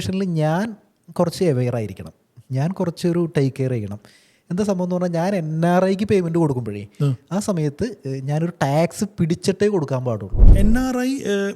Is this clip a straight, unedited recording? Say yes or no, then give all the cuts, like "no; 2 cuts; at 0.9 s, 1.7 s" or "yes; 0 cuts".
no; 1 cut; at 10.5 s